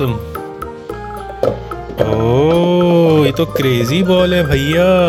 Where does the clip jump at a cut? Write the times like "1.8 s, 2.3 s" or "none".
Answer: none

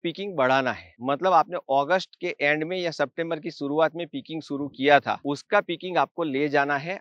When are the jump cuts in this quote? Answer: none

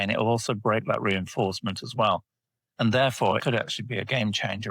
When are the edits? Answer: 3.4 s

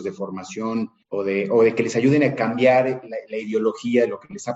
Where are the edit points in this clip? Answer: 1.0 s

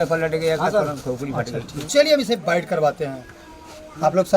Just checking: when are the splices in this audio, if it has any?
1.9 s

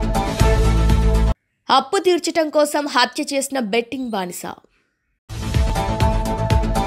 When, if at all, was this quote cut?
none

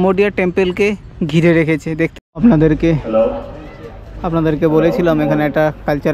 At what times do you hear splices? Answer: 2.1 s

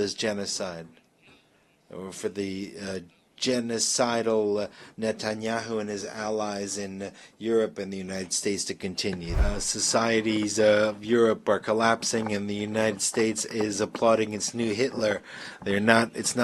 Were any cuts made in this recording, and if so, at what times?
9.3 s

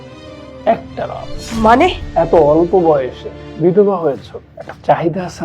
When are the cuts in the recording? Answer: 1.3 s, 2.0 s

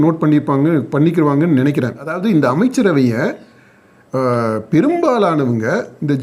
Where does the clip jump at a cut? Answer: 2.1 s

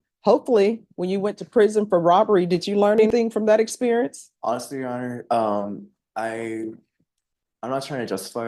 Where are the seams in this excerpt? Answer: 3.1 s

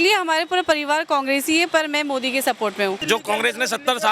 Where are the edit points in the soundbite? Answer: 3.0 s

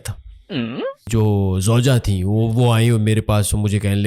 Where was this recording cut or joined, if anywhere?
1.1 s

